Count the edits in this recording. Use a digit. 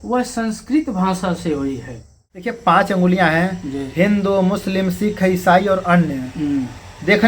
1